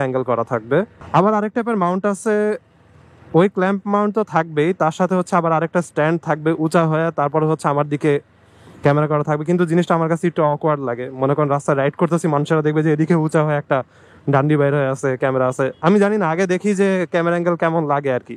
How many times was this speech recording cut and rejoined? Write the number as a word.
one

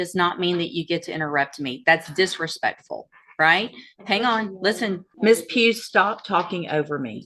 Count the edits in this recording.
one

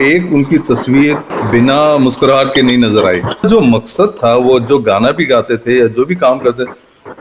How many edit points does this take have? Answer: two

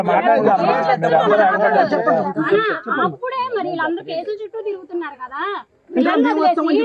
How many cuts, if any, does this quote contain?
zero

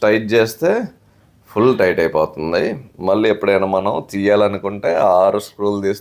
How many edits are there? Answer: zero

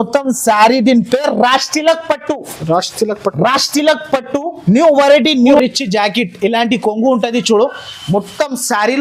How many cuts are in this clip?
one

